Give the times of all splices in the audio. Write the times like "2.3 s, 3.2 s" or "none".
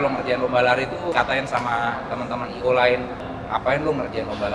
1.1 s, 3.1 s